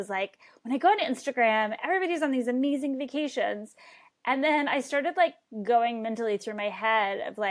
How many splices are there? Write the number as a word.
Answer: zero